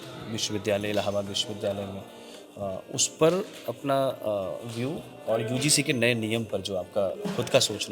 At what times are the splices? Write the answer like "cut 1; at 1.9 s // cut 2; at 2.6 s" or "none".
none